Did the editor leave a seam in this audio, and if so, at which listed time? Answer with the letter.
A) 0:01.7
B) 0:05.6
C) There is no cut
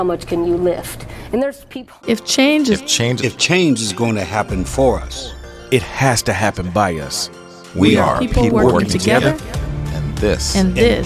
A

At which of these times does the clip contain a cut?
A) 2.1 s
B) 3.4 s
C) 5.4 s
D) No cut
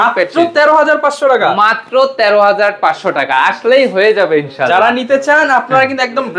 D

